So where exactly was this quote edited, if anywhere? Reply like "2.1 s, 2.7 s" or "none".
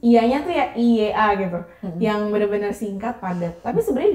none

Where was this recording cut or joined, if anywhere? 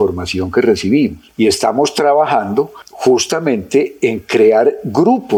none

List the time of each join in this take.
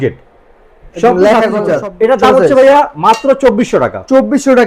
1.6 s

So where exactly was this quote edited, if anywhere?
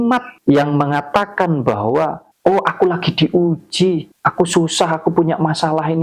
none

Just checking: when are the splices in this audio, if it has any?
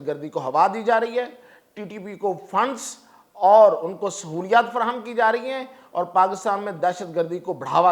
none

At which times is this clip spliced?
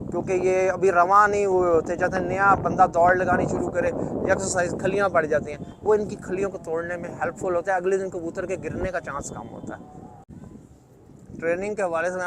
10.3 s

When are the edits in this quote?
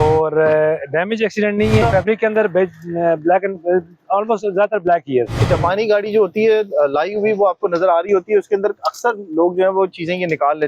1.8 s, 5.4 s

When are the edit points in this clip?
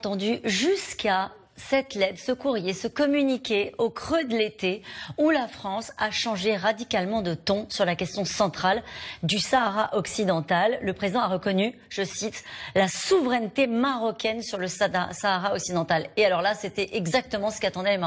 none

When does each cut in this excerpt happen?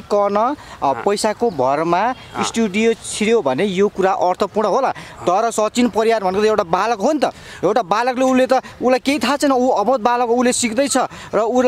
none

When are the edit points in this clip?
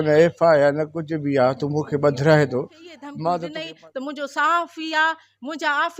3.5 s

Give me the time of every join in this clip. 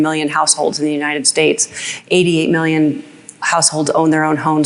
none

